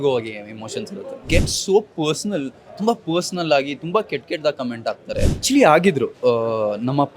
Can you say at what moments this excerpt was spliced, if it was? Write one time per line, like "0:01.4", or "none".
0:01.2
0:05.4